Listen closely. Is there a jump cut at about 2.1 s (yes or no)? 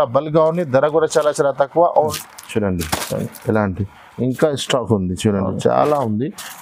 yes